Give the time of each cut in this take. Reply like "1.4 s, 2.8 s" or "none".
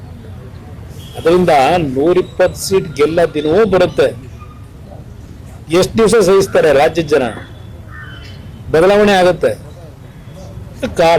none